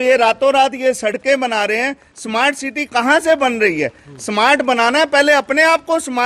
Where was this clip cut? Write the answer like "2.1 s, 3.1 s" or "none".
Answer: none